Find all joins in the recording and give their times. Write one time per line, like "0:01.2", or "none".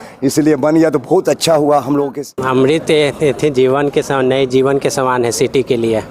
0:02.2